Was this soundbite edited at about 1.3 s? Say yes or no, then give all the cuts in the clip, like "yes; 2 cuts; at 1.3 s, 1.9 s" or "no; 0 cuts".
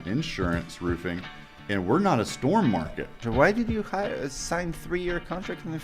no; 1 cut; at 3.2 s